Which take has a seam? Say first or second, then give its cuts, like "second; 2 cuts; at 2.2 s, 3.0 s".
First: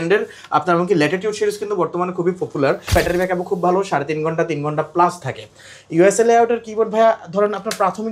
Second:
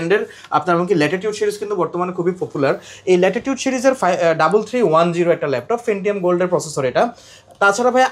first; 1 cut; at 2.9 s